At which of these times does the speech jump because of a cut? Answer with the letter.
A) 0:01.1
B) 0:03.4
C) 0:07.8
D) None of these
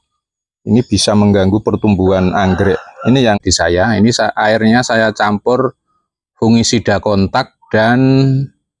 B